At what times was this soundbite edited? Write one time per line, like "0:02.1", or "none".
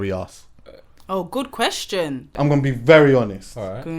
0:02.3

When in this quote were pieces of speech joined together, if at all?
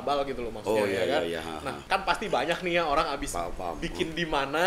0:01.8

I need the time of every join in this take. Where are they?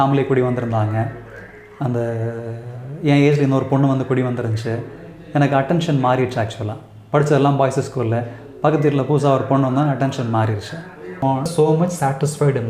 0:11.5

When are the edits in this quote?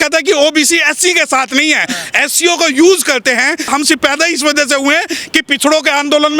0:03.7

